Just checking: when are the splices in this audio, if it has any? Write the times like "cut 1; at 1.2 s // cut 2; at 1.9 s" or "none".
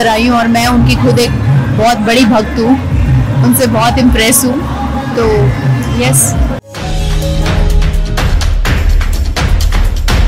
cut 1; at 6.6 s